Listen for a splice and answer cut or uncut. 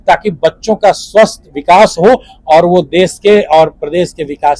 uncut